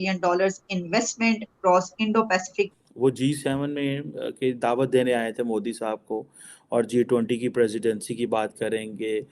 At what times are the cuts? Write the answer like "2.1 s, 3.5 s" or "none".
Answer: 2.7 s